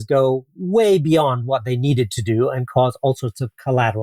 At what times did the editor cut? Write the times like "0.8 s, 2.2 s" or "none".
none